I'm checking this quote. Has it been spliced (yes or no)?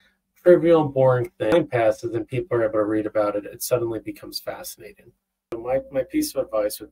yes